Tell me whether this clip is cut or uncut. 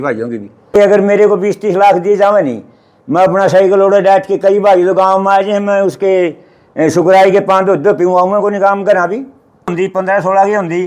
cut